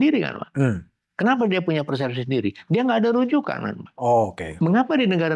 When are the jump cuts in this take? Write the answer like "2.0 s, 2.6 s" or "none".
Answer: 4.4 s